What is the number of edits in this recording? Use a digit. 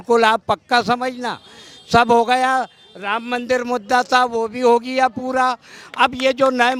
0